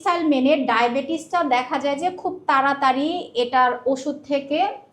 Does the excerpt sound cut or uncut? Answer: uncut